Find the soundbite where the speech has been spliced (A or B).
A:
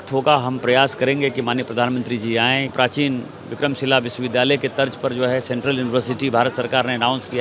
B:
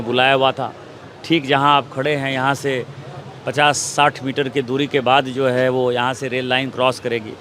A